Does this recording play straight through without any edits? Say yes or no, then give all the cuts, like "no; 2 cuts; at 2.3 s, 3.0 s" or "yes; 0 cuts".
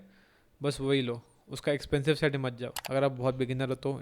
no; 1 cut; at 2.7 s